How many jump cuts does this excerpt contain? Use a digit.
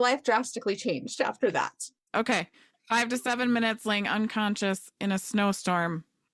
1